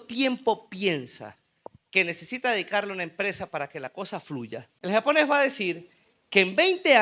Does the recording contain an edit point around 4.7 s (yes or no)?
yes